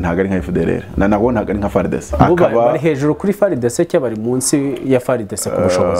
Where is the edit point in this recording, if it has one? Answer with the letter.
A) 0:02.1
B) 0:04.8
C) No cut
A